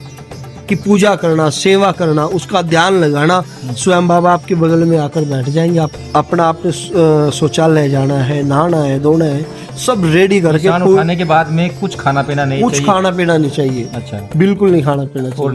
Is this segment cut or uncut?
cut